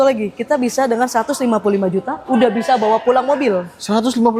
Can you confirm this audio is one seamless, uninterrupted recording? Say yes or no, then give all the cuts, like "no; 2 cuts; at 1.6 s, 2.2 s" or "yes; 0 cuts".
yes; 0 cuts